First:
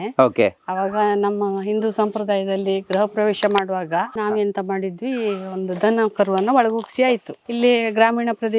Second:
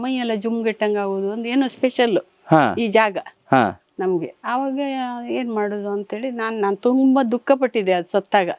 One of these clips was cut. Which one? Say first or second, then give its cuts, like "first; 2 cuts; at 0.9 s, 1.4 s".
first; 2 cuts; at 4.1 s, 7.4 s